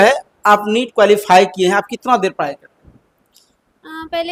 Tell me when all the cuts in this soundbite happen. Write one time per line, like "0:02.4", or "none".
none